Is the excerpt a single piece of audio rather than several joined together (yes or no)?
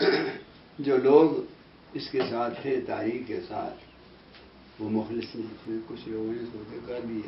no